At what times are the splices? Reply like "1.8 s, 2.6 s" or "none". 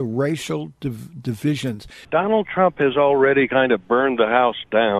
2.1 s